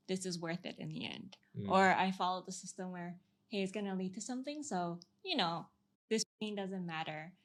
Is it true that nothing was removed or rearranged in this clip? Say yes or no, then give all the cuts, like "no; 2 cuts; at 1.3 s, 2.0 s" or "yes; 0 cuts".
yes; 0 cuts